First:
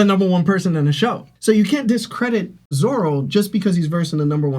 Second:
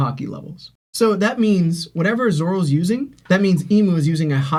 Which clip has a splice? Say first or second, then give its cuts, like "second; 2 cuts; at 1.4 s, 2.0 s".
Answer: first; 1 cut; at 2.6 s